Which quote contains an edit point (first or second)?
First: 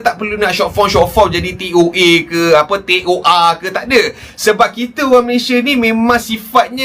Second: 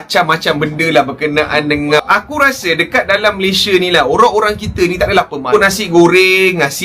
second